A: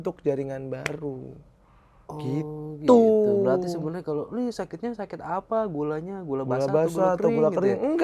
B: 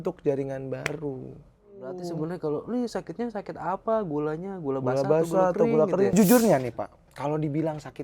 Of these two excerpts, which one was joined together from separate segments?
B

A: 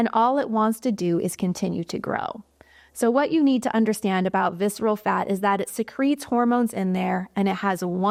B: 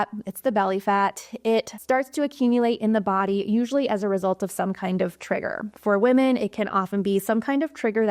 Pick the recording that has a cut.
B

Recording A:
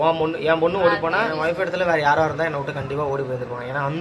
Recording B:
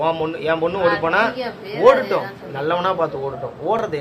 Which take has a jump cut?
A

